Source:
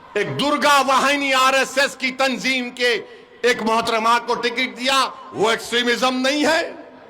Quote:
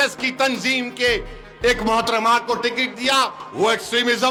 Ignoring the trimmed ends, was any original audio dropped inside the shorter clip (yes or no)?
no